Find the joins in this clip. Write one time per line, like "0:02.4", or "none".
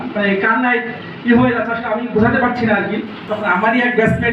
0:03.2

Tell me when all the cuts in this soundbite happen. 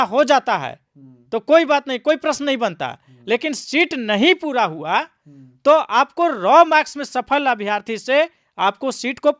none

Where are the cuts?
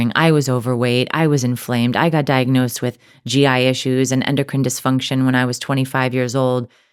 none

